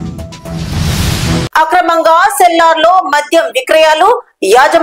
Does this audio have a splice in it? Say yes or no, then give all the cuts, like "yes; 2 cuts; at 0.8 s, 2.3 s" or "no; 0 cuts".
yes; 1 cut; at 1.4 s